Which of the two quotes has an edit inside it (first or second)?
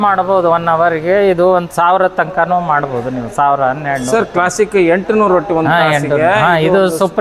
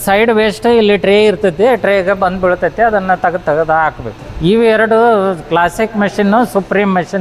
second